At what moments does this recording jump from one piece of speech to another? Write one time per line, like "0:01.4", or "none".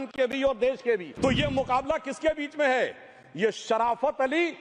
0:01.1